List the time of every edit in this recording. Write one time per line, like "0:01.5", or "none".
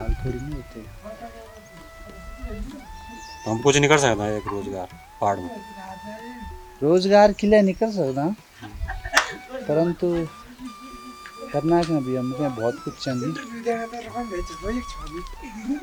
none